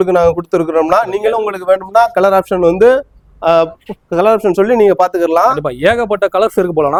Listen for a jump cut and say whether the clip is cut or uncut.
uncut